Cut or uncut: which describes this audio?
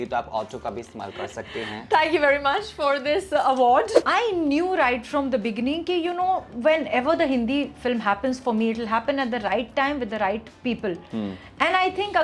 cut